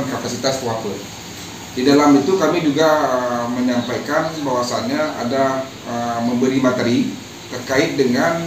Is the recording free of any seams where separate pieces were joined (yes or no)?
yes